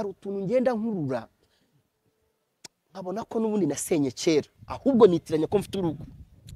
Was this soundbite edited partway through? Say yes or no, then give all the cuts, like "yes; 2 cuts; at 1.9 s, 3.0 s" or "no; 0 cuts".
no; 0 cuts